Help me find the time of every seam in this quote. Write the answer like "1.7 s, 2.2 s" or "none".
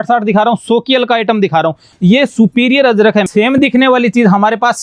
1.8 s, 3.3 s